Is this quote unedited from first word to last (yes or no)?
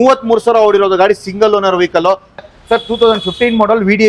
no